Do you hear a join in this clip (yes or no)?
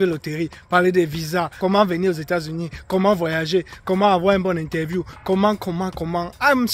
yes